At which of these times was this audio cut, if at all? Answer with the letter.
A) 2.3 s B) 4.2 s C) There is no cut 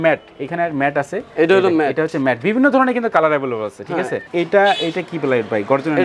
B